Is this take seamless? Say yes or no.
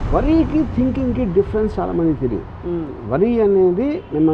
yes